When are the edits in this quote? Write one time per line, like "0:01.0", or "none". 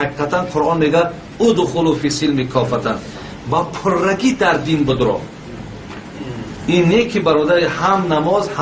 0:06.9